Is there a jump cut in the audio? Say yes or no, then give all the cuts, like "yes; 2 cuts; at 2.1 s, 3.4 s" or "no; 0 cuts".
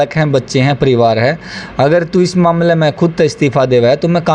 no; 0 cuts